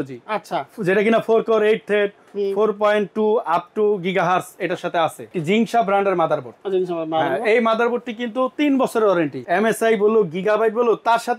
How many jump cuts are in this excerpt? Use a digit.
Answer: 2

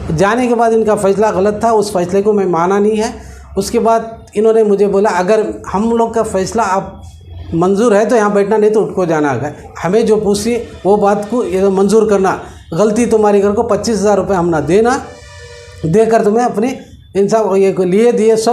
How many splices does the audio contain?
1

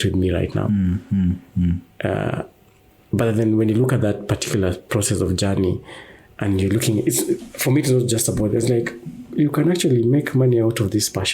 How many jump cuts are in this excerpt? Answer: 0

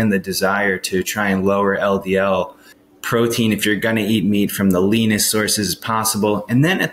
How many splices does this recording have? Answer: 1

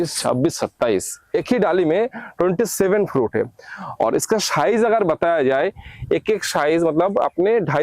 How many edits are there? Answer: 0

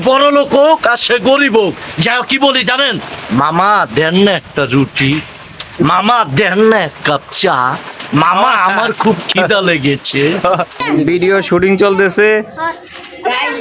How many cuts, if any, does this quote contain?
1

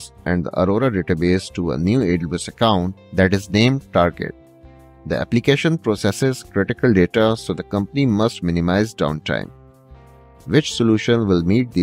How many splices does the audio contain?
0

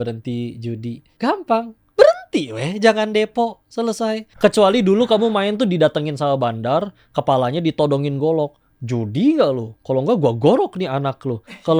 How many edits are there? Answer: 2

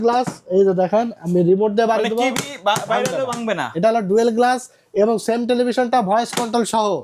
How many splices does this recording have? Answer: 0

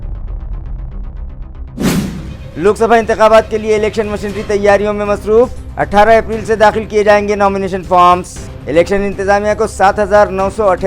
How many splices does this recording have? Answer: 1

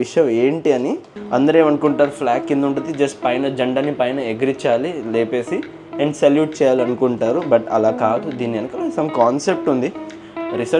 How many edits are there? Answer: 1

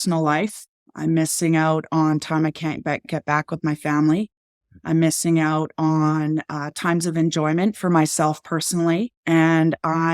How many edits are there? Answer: 1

